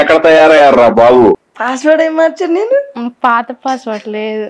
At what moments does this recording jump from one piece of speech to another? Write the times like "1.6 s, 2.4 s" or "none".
1.4 s